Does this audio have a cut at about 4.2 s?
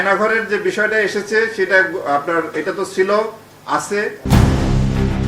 yes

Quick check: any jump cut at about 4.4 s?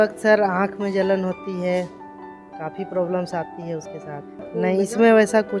yes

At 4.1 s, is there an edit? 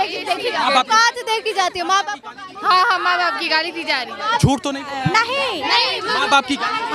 no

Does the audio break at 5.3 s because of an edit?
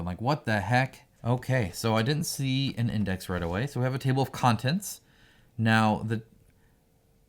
no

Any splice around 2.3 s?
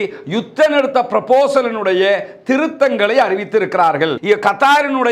no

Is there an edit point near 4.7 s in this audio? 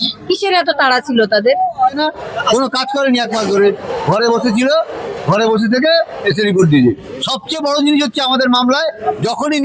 no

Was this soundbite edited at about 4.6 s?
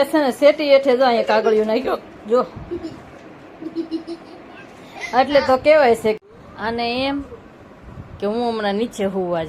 no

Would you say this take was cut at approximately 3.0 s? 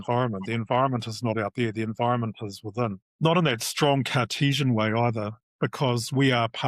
yes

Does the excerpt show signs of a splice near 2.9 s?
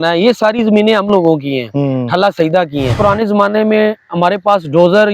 yes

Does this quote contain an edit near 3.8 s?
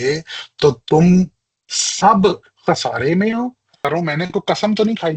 yes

